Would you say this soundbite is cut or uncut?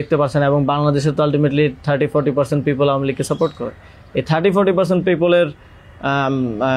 uncut